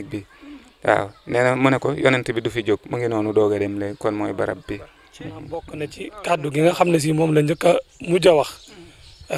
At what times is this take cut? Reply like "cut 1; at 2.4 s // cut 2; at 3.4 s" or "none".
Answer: cut 1; at 5.5 s